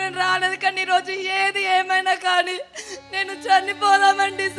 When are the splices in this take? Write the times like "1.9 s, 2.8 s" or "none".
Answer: none